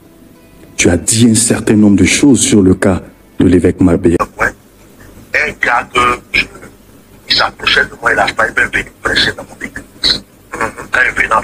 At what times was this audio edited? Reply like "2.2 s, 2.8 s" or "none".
4.2 s